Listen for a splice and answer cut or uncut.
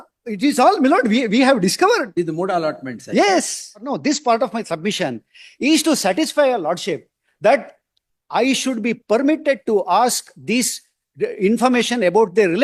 uncut